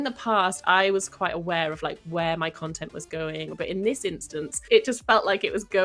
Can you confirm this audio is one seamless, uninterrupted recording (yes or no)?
no